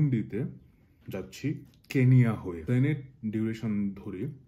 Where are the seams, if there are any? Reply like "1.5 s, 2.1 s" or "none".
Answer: 2.6 s

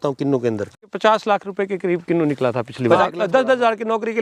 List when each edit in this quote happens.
0.8 s, 2.8 s

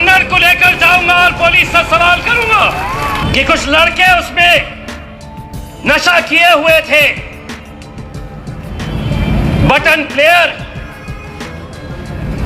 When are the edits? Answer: 3.2 s

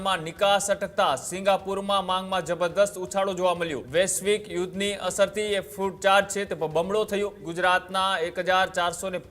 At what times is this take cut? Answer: 3.8 s, 7.4 s

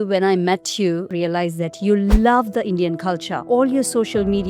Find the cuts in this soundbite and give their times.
1.1 s, 3.3 s

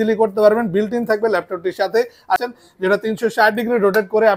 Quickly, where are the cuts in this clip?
2.4 s

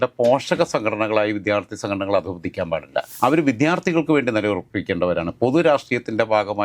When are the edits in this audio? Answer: 3.1 s

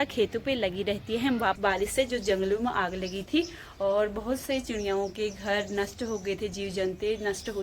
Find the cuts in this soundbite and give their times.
1.6 s

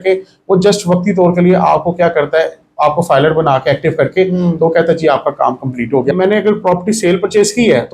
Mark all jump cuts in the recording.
6.1 s

